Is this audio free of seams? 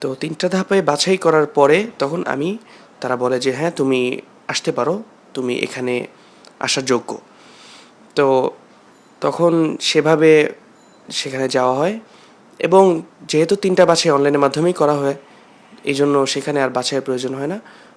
yes; 0 cuts

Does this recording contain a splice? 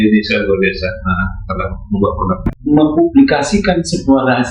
yes; 1 cut; at 2.5 s

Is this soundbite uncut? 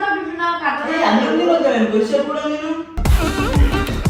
yes; 0 cuts

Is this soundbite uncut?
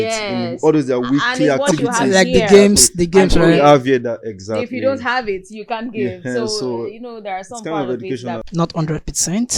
no; 1 cut; at 8.5 s

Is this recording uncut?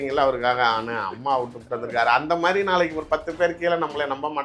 yes; 0 cuts

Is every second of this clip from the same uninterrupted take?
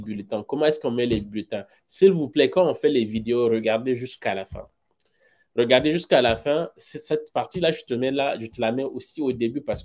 yes; 0 cuts

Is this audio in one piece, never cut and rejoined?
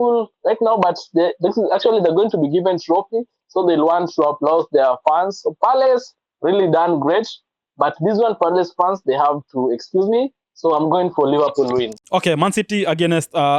yes; 0 cuts

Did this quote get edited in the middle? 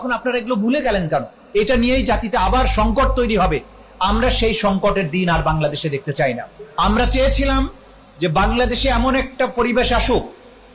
yes; 2 cuts; at 1.4 s, 6.5 s

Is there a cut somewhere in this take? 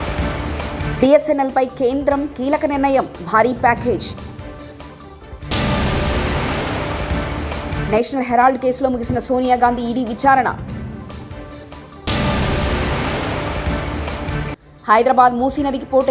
yes; 1 cut; at 0.9 s

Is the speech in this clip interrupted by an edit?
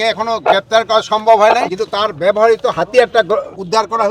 yes; 1 cut; at 1.8 s

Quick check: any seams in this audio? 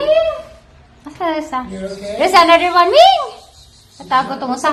no; 0 cuts

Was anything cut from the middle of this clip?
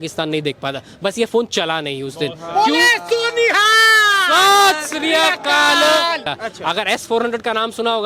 yes; 1 cut; at 6.3 s

